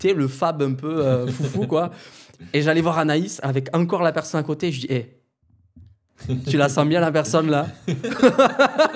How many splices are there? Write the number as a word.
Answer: zero